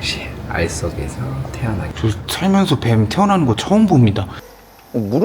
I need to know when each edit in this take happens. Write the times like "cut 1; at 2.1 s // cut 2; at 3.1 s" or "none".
cut 1; at 1.9 s // cut 2; at 4.3 s

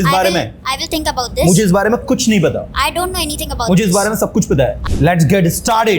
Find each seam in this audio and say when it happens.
cut 1; at 4.8 s

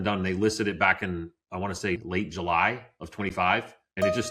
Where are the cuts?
cut 1; at 1.4 s // cut 2; at 2.0 s // cut 3; at 3.4 s

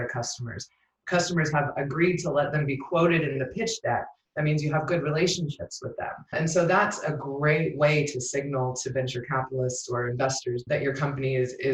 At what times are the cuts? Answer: cut 1; at 6.3 s // cut 2; at 10.6 s

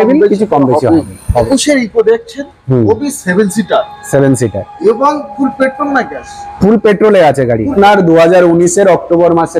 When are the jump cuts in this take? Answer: cut 1; at 1.5 s // cut 2; at 7.7 s

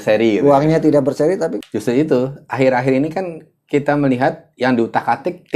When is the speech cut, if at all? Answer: cut 1; at 1.5 s

